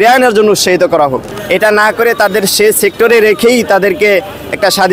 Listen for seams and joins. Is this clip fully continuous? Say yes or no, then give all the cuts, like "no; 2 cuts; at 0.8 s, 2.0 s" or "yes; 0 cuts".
no; 1 cut; at 1.3 s